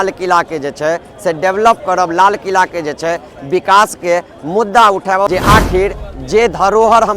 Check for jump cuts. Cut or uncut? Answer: cut